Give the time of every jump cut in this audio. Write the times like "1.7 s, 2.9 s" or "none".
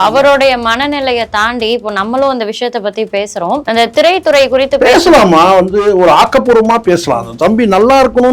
3.6 s